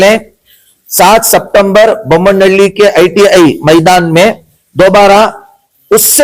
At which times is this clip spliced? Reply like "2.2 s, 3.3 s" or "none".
none